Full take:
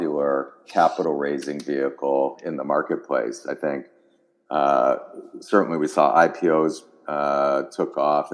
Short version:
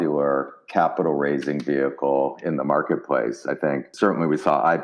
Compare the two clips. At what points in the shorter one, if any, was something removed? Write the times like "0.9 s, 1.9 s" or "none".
3.9 s